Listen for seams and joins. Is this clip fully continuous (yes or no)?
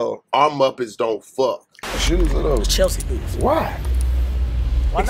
no